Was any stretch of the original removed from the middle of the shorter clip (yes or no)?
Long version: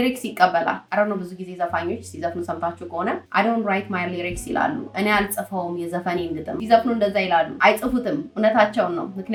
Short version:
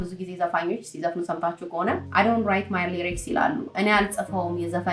no